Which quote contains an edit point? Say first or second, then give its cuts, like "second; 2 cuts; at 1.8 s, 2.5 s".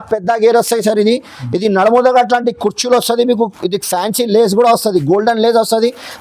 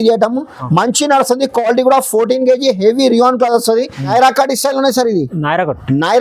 second; 1 cut; at 4.1 s